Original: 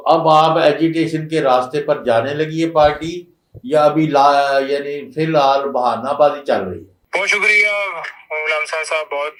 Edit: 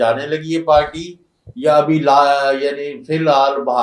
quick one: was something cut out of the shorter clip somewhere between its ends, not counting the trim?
no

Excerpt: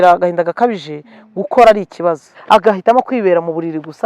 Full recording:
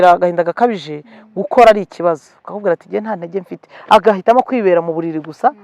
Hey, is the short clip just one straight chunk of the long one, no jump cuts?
no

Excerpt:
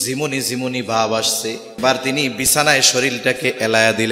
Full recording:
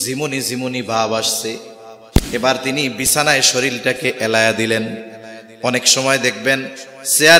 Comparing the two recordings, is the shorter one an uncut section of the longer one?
no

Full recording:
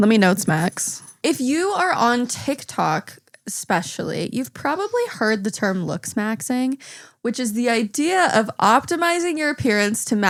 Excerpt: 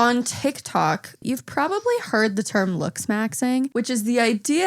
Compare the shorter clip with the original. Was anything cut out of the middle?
yes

